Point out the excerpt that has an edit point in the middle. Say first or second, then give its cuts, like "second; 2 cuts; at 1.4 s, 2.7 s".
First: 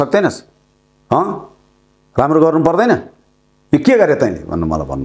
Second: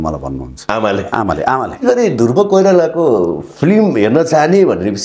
second; 1 cut; at 1.8 s